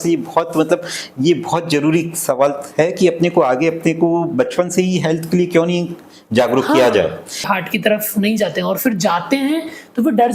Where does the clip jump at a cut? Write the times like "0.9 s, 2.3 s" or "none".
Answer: 7.4 s